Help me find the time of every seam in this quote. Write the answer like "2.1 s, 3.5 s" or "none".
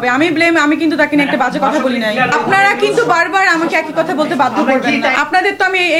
2.3 s, 5.1 s